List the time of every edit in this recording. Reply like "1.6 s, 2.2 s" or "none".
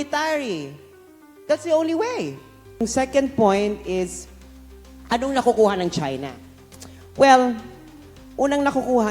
2.8 s

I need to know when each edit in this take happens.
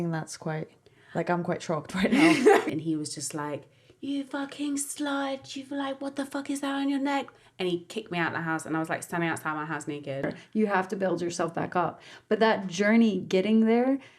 2.7 s, 10.4 s

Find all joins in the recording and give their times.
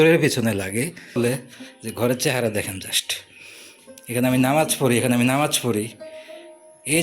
1.2 s

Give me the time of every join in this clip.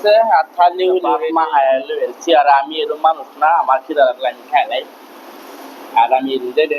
1.0 s

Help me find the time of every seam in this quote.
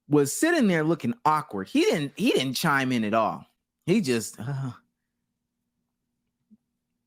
none

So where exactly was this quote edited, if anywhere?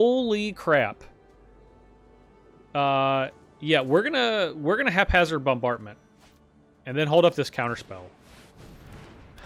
none

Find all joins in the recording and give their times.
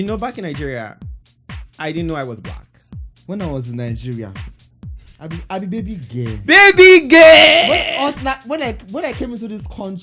3.1 s

